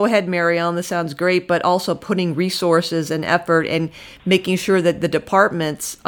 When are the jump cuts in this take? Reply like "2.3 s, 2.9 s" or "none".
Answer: none

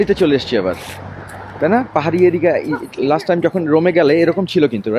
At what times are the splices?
none

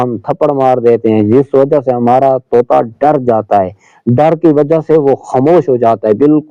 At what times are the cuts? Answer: none

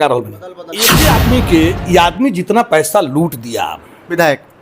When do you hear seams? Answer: 0.9 s

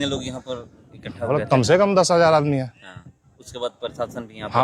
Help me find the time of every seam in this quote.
none

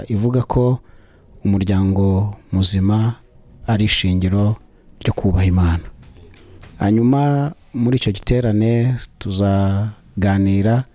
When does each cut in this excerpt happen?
none

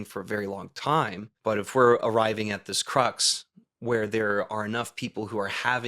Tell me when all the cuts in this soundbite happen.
1.2 s

